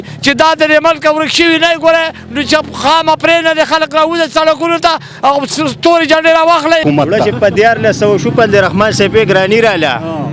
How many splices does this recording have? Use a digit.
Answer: 1